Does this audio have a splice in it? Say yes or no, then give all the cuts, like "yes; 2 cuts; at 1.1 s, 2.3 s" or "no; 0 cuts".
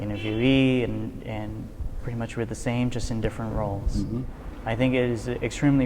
yes; 1 cut; at 4.4 s